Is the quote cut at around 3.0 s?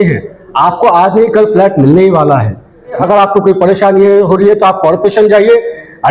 yes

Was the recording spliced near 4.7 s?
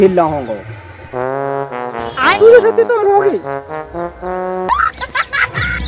yes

